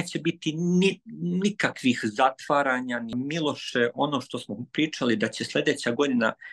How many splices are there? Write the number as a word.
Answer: one